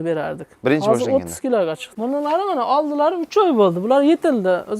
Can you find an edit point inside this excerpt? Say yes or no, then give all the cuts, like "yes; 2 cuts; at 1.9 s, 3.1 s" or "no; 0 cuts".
yes; 1 cut; at 1.9 s